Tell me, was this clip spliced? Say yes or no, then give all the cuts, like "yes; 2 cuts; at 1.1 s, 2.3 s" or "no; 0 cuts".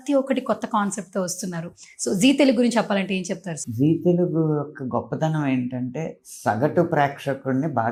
no; 0 cuts